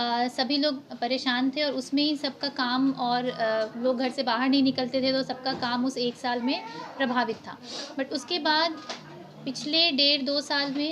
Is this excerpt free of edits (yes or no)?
yes